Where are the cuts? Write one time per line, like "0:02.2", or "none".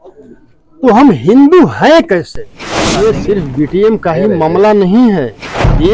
0:02.8

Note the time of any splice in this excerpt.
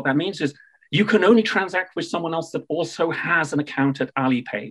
none

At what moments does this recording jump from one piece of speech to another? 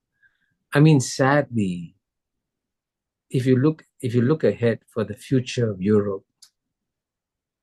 none

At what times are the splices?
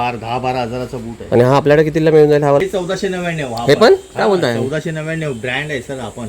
0:02.6

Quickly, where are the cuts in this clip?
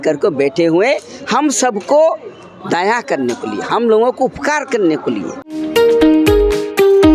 0:05.5

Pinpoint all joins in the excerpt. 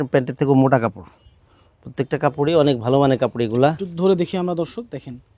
none

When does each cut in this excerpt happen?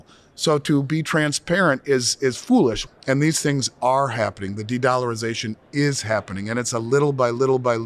0:02.9

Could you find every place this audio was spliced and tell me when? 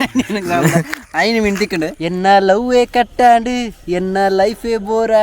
0:02.0

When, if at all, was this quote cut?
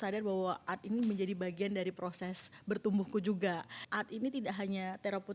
0:03.8

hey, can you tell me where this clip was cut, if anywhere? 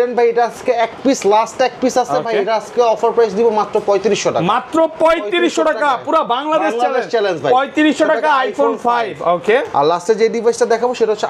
none

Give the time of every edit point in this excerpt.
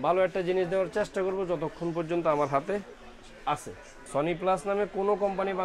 0:03.9

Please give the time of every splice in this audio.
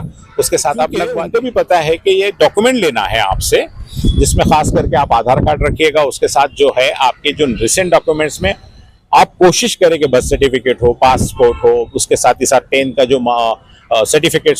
0:01.2

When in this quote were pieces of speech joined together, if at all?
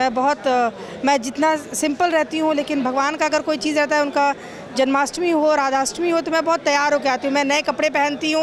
none

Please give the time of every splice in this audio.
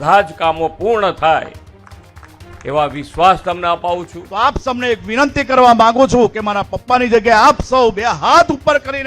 0:04.2

